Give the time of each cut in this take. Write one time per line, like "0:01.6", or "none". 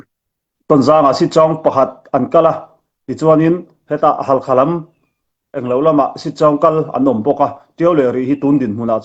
none